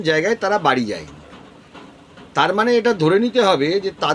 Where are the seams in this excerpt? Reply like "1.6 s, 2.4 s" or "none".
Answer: none